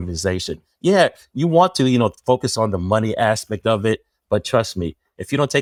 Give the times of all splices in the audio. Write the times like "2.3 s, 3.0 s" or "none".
none